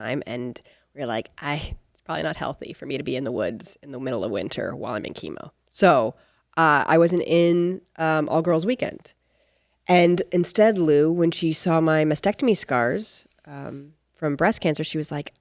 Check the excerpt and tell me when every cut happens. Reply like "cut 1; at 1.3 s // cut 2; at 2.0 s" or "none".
none